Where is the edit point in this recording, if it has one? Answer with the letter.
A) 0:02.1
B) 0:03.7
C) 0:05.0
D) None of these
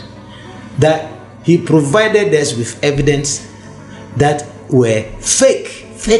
D